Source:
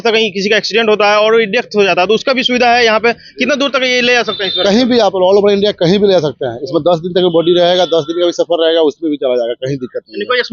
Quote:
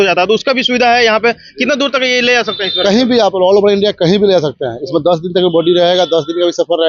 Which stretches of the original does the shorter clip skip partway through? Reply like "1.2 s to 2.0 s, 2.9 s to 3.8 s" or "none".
none